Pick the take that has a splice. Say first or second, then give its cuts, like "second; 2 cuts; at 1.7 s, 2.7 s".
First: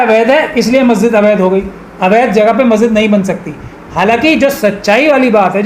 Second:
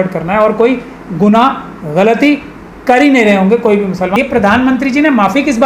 second; 1 cut; at 4.1 s